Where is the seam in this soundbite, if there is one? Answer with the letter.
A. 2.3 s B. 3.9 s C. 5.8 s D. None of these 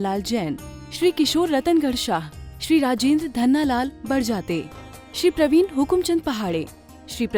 D